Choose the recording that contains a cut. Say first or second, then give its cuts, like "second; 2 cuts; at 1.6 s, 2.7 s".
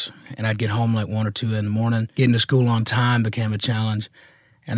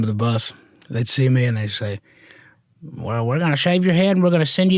first; 1 cut; at 2.1 s